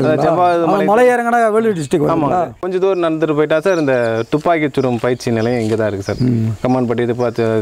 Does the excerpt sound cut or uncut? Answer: cut